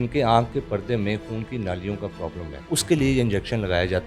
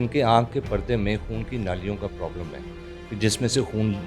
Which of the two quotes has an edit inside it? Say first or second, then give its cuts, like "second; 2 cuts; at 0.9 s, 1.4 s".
first; 1 cut; at 2.6 s